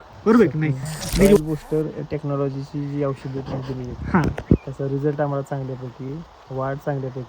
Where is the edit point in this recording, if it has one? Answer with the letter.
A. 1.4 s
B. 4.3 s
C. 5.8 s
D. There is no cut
A